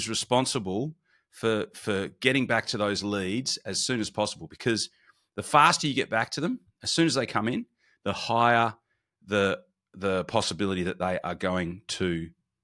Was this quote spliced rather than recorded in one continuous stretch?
no; 0 cuts

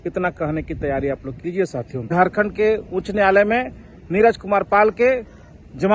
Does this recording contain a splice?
yes; 1 cut; at 2.1 s

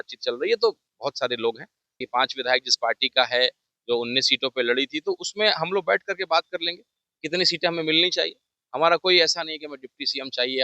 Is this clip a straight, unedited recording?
no; 1 cut; at 2.0 s

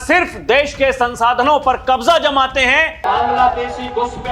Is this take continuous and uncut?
no; 1 cut; at 2.9 s

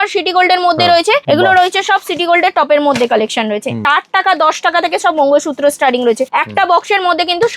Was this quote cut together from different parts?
yes; 3 cuts; at 1.2 s, 3.8 s, 6.3 s

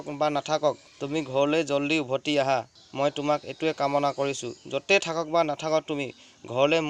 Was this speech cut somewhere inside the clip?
yes; 2 cuts; at 0.9 s, 2.8 s

